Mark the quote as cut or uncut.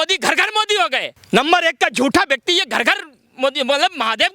cut